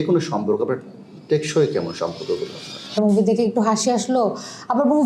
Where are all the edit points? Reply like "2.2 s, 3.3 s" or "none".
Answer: 2.9 s